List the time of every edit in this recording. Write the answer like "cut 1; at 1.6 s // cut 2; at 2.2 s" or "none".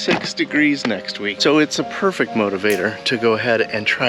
none